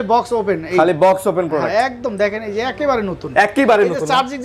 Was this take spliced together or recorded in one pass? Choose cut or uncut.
uncut